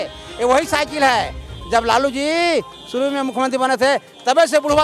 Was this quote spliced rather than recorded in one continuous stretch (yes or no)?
no